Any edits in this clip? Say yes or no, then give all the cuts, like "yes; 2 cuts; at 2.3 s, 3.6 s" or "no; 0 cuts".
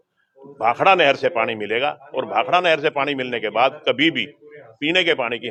no; 0 cuts